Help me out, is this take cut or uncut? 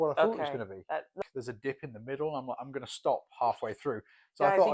cut